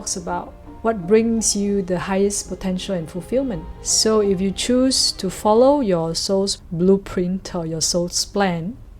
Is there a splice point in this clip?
yes; 1 cut; at 3.7 s

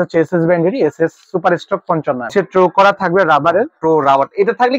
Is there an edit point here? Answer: yes; 1 cut; at 2.3 s

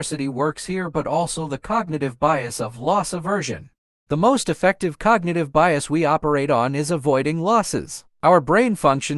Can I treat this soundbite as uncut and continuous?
yes; 0 cuts

